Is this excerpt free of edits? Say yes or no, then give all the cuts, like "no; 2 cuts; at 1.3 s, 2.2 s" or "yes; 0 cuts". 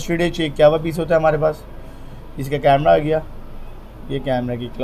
yes; 0 cuts